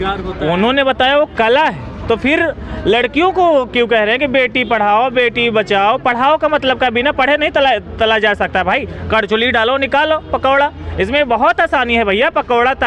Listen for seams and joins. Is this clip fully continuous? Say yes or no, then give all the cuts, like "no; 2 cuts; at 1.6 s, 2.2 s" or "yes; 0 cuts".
yes; 0 cuts